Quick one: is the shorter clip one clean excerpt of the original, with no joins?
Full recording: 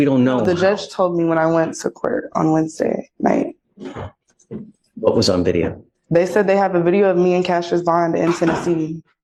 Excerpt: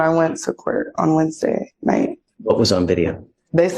no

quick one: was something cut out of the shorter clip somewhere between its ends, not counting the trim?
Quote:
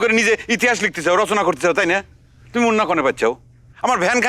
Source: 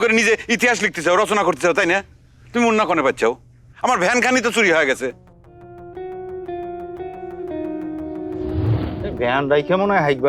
no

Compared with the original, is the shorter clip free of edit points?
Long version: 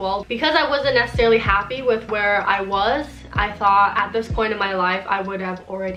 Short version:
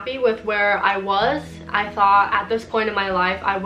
yes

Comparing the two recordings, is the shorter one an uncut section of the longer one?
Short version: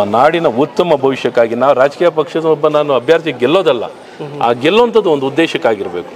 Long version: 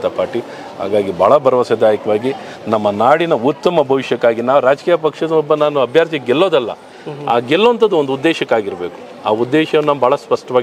yes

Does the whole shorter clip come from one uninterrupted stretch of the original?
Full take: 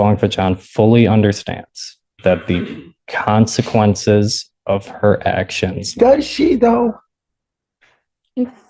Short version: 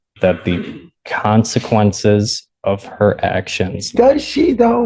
yes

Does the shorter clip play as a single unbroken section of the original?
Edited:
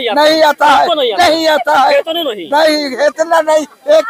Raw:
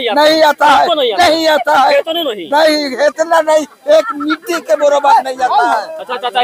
yes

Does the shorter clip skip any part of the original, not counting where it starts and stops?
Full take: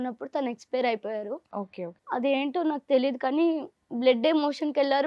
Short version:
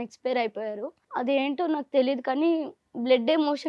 yes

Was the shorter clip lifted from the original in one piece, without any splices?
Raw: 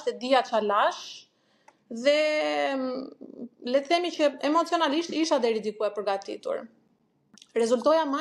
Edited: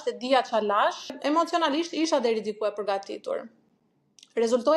no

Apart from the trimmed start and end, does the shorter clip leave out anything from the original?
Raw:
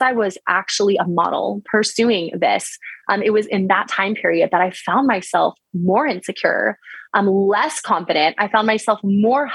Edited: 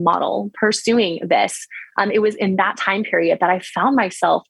no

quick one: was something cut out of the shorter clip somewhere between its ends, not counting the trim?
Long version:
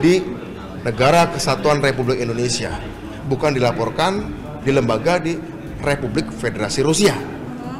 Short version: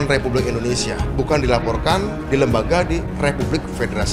yes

